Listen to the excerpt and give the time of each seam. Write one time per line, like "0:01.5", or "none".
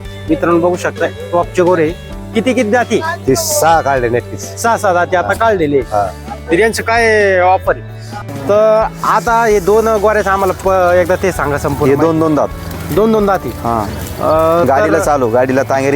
0:08.3